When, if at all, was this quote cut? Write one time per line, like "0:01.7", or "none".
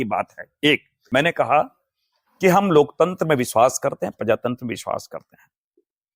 0:00.9